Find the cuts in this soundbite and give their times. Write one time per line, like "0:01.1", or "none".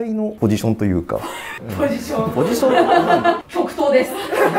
0:03.4